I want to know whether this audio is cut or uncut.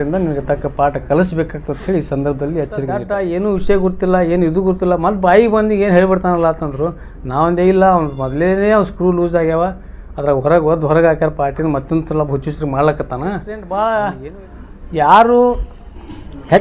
cut